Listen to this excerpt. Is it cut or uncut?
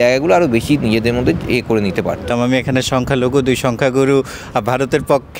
cut